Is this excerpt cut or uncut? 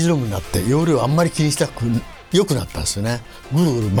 uncut